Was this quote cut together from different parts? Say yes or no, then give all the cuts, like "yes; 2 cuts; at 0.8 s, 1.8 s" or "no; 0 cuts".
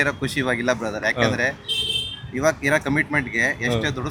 no; 0 cuts